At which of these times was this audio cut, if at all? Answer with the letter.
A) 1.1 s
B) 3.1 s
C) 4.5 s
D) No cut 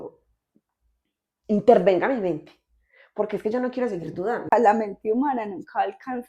C